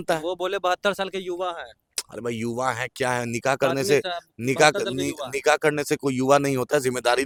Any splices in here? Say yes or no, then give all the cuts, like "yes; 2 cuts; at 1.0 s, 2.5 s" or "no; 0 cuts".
no; 0 cuts